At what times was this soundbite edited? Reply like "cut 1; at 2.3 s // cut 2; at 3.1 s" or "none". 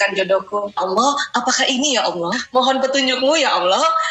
cut 1; at 0.8 s // cut 2; at 2.4 s